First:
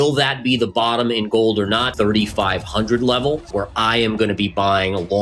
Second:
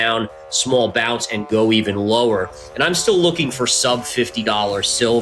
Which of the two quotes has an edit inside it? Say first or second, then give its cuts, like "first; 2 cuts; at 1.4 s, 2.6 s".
first; 2 cuts; at 1.9 s, 3.5 s